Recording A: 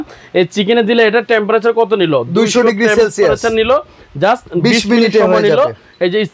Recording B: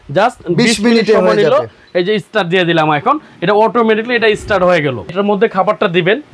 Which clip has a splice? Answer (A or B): B